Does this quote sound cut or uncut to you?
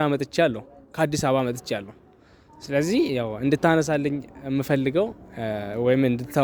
uncut